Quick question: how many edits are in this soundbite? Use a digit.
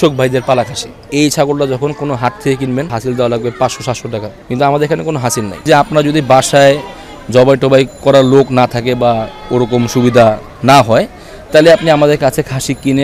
3